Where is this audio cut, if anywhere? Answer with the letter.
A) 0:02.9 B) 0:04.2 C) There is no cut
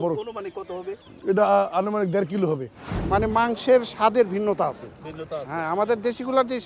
A